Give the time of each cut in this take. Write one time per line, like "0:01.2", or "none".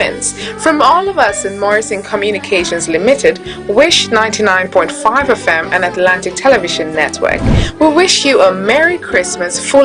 none